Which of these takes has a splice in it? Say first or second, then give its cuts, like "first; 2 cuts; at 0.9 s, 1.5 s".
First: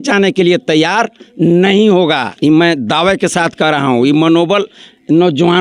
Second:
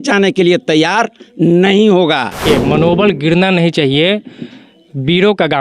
second; 1 cut; at 2.4 s